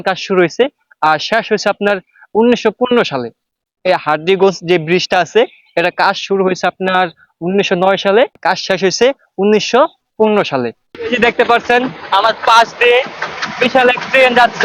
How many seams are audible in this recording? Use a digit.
2